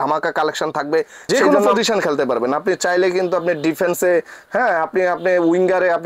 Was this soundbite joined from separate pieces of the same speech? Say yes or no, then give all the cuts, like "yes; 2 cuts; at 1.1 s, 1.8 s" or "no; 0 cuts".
yes; 1 cut; at 1.3 s